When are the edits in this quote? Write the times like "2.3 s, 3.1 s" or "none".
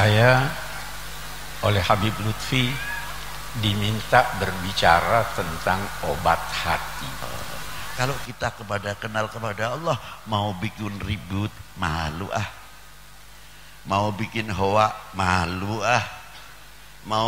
7.8 s